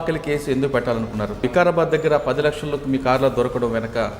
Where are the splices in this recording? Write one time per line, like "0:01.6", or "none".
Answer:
0:01.4